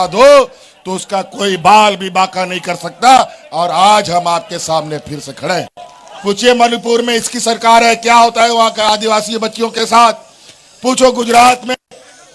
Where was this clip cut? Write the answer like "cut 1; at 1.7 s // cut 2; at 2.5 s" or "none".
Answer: cut 1; at 6.1 s